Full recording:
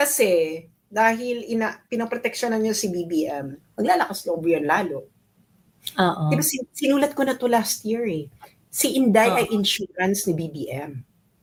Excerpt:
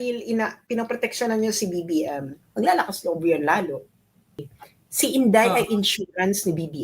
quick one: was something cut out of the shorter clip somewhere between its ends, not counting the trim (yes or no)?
yes